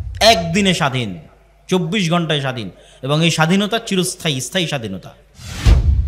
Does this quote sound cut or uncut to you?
uncut